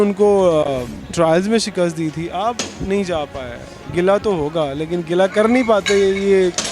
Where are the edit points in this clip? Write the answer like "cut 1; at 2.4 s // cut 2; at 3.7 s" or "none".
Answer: none